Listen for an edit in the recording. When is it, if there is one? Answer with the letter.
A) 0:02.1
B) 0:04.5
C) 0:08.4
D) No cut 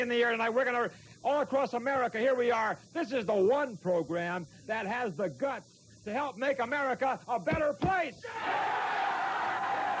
C